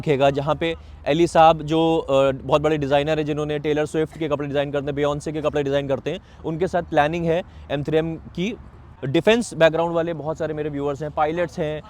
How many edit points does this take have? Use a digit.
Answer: 1